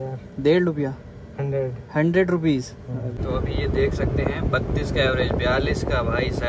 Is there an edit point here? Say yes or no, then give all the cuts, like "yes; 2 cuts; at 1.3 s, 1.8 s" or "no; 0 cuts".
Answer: yes; 1 cut; at 3.1 s